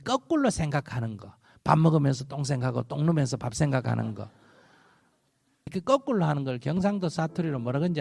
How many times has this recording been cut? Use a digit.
1